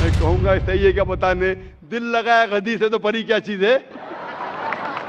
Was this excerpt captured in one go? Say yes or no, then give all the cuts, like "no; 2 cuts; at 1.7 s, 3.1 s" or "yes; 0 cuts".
yes; 0 cuts